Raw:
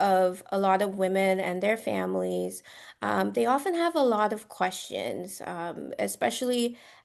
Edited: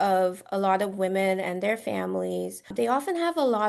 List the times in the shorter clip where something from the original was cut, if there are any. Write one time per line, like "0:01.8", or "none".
0:02.7